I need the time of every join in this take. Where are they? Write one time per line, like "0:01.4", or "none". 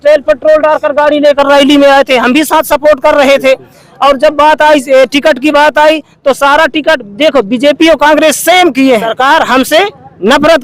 0:09.1